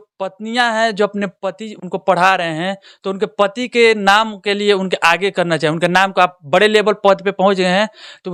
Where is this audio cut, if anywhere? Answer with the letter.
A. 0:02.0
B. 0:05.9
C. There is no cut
C